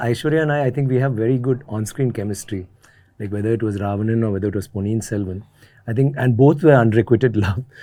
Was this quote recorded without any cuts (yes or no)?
yes